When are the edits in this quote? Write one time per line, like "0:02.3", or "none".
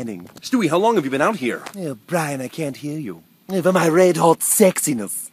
0:02.5